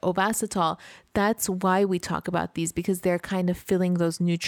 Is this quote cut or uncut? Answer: uncut